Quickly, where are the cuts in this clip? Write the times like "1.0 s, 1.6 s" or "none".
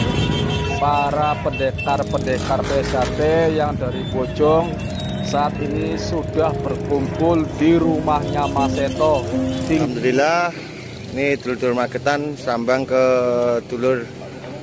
9.9 s